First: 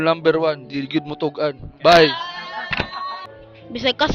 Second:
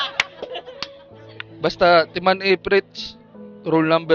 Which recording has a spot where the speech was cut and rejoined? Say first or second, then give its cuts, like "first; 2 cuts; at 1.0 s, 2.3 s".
first; 1 cut; at 3.0 s